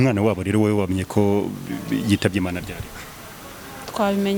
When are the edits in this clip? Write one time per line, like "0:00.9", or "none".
none